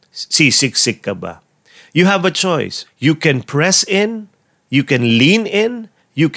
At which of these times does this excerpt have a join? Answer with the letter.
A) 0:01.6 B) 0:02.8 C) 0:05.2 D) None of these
B